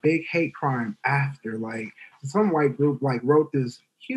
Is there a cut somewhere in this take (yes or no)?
yes